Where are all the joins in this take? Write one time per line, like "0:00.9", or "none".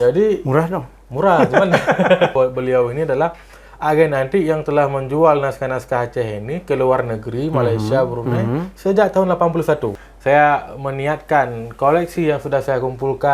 0:02.3
0:10.1